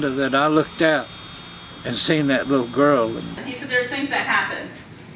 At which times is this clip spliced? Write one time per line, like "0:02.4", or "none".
0:03.4